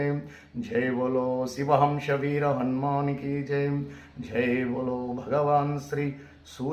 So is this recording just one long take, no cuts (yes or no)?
no